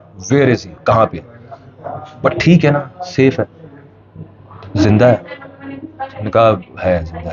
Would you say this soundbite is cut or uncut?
uncut